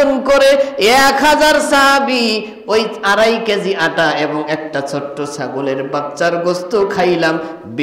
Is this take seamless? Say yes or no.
yes